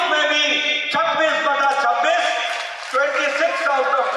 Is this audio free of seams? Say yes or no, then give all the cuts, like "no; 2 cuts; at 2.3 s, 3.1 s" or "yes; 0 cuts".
yes; 0 cuts